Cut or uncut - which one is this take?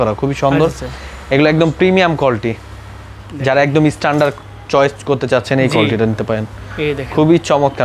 uncut